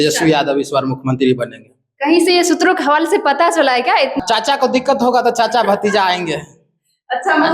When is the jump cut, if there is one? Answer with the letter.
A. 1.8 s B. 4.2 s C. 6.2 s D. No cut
B